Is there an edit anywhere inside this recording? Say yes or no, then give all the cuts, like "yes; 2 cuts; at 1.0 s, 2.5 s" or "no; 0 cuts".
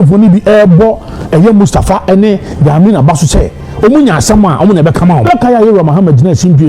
yes; 1 cut; at 5.2 s